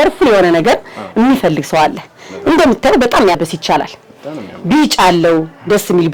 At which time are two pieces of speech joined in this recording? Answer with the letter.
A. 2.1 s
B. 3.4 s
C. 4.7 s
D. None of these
B